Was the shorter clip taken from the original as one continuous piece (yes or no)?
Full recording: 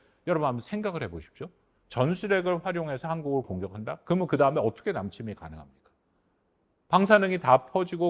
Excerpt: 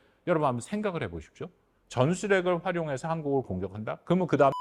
yes